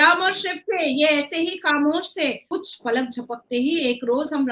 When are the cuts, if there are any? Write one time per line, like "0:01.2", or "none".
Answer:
0:02.4